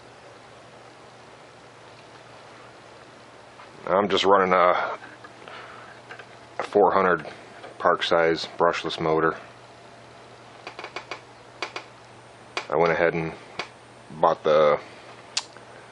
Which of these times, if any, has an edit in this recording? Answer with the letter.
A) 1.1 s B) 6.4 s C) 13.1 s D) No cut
C